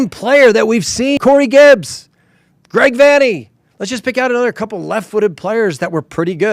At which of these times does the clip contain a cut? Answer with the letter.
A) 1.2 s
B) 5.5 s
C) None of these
A